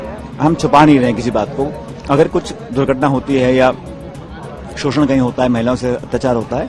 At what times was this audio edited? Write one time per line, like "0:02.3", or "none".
none